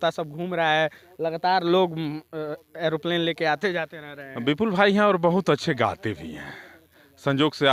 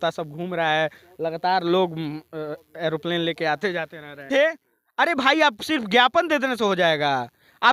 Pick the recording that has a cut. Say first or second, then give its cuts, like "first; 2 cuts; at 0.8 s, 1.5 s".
second; 1 cut; at 4.3 s